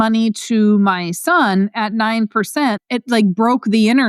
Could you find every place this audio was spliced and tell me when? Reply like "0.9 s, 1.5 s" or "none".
2.8 s